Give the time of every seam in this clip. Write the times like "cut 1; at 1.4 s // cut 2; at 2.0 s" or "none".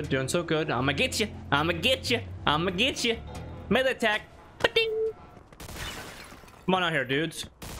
cut 1; at 5.4 s